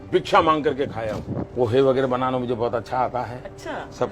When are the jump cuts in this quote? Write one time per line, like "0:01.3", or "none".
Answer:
0:01.5